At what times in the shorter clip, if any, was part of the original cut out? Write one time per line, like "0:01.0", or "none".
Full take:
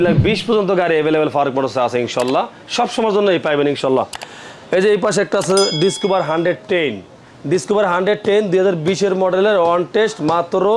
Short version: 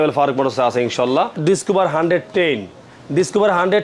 0:01.4